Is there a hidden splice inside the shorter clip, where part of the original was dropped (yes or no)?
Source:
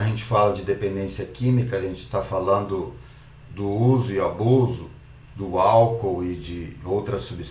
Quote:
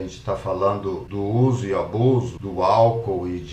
yes